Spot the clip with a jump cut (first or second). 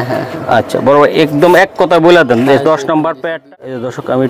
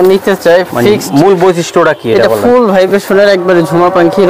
first